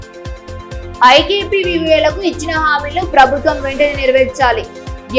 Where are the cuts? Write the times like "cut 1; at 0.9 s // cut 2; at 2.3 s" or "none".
cut 1; at 1.0 s